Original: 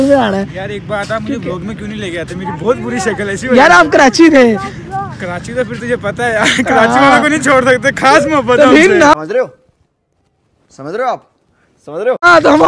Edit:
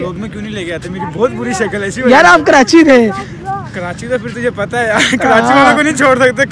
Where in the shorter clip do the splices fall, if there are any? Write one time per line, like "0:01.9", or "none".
none